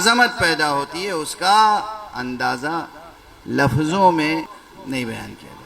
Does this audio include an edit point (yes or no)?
yes